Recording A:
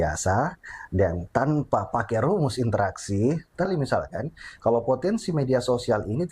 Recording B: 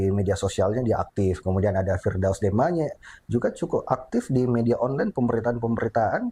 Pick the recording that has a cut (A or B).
A